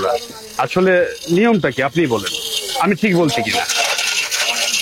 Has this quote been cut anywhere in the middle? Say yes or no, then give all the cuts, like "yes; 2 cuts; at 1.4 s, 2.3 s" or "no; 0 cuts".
no; 0 cuts